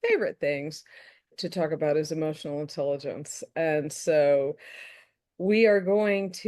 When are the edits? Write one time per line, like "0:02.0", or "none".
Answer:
0:01.3